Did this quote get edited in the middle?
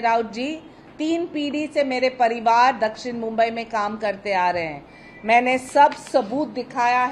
no; 0 cuts

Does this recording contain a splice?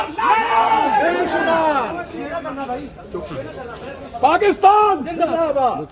no; 0 cuts

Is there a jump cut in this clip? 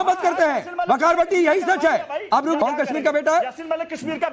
yes; 1 cut; at 2.6 s

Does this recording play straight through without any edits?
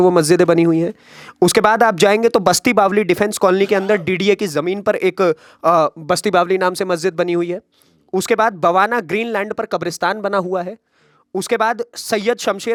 yes; 0 cuts

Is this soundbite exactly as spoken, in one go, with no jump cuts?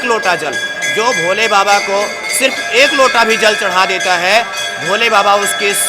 yes; 0 cuts

